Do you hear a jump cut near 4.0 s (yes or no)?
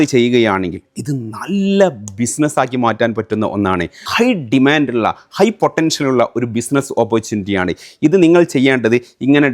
yes